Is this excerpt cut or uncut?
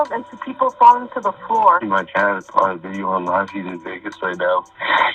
cut